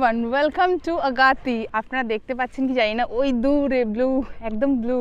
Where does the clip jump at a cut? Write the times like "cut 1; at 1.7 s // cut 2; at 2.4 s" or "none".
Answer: cut 1; at 1.7 s